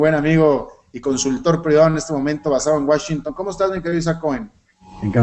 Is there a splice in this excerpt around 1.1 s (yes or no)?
no